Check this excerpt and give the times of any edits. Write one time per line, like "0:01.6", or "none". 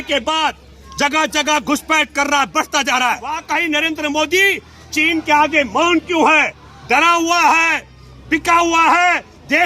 0:03.4